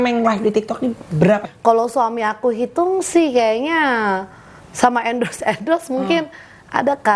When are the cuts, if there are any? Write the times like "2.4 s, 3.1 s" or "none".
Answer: 1.5 s